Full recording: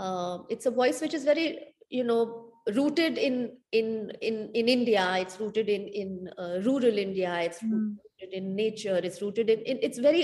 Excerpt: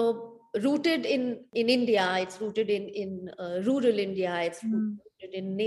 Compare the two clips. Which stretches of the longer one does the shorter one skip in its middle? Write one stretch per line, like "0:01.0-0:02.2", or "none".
0:03.6-0:04.5